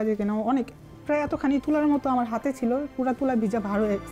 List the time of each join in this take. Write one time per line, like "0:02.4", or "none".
none